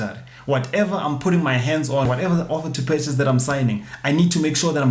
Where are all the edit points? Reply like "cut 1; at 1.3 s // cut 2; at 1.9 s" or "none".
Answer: cut 1; at 2.1 s